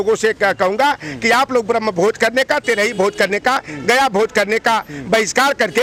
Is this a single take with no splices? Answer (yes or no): yes